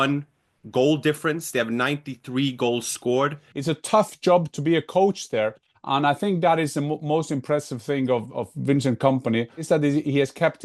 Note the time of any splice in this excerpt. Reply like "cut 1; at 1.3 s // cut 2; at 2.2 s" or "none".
cut 1; at 3.5 s // cut 2; at 9.6 s